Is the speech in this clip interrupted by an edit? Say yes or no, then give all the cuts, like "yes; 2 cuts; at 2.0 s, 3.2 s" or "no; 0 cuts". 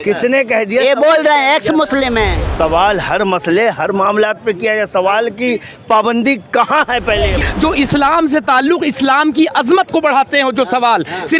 yes; 2 cuts; at 2.4 s, 7.4 s